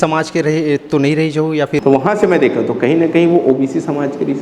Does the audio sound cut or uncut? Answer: cut